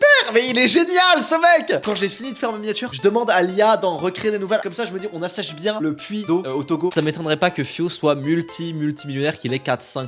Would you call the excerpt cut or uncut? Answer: cut